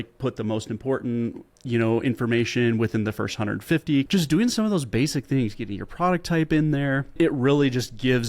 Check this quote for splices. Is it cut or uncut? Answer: cut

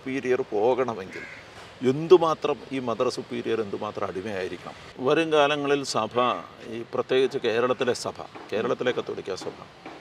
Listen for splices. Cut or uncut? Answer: cut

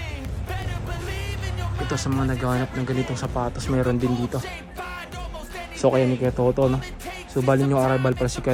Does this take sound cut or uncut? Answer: uncut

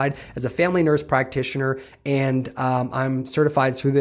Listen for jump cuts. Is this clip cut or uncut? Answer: uncut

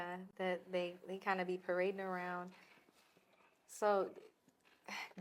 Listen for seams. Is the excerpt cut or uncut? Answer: uncut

